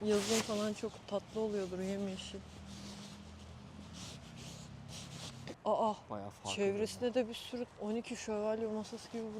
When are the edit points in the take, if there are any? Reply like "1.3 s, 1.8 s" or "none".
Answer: 5.5 s, 7.7 s